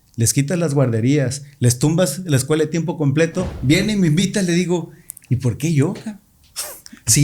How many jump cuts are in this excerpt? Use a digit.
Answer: 1